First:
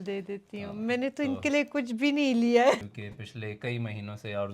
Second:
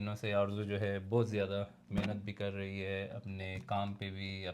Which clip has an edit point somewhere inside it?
first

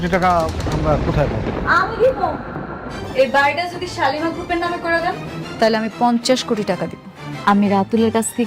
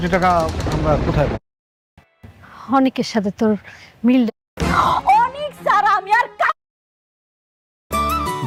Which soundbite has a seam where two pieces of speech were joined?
first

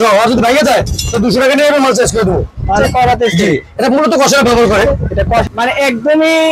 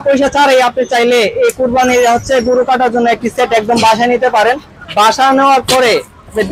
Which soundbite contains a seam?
first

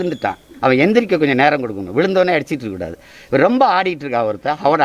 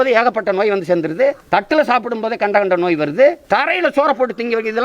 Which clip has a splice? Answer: second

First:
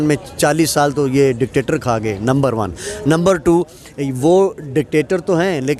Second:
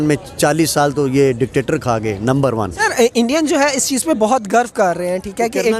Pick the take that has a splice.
second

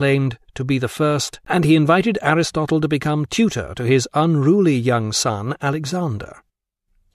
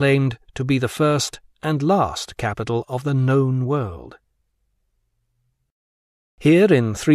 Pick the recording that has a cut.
second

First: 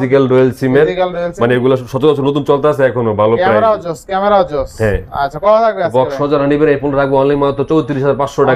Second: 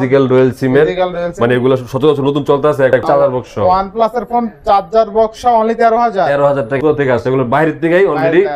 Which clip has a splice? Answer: second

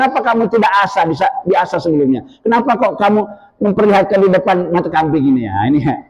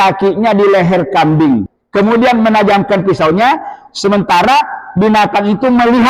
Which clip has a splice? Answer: second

